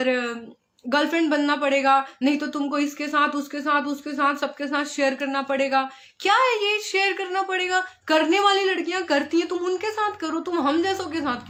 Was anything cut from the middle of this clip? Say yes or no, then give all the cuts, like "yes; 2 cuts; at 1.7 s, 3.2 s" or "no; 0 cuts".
no; 0 cuts